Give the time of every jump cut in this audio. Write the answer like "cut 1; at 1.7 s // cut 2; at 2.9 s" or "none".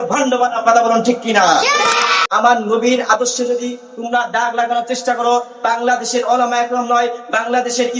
cut 1; at 2.2 s